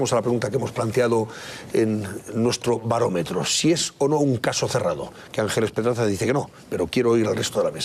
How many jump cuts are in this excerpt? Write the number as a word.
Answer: one